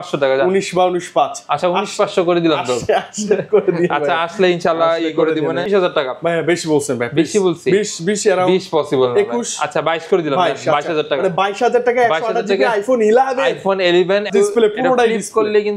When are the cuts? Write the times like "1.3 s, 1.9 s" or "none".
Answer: 5.7 s, 14.3 s